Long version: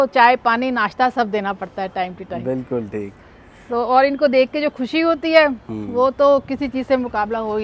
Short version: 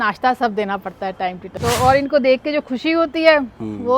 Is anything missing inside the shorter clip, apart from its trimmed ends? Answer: yes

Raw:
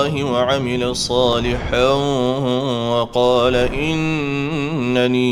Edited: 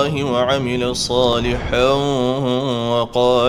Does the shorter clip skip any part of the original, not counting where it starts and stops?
no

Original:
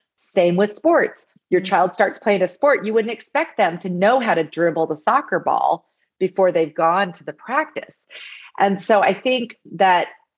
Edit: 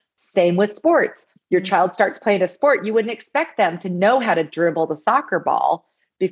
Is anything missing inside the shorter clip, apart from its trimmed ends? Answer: no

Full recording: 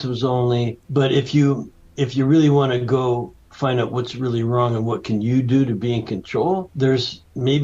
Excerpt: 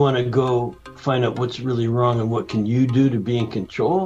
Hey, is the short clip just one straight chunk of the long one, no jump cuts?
yes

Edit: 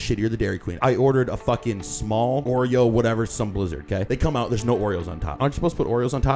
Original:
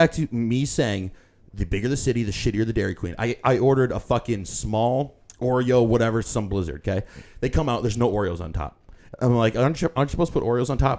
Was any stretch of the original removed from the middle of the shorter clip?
yes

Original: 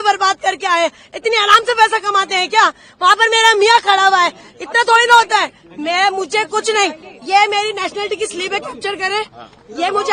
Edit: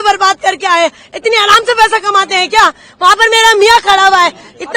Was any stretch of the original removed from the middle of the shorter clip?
no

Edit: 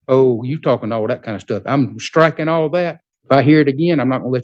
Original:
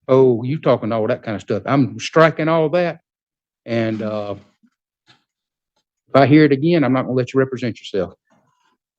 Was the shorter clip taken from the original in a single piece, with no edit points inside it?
no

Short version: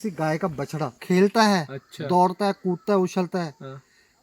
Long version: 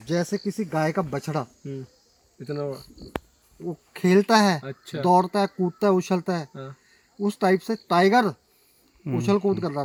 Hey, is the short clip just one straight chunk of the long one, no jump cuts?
no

